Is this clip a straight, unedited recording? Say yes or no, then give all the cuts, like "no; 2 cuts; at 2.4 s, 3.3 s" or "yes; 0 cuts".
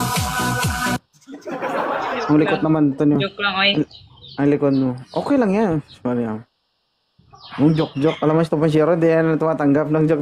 no; 1 cut; at 0.9 s